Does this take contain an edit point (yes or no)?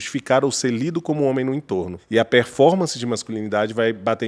yes